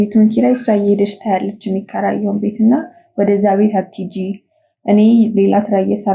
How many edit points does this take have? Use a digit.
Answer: 0